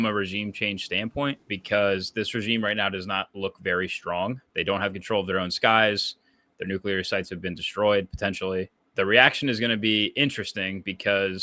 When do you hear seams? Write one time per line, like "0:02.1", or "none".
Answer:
0:01.5
0:04.4
0:08.8